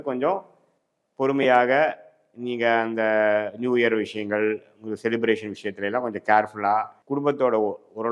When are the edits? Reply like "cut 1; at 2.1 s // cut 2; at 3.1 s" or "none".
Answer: cut 1; at 7.0 s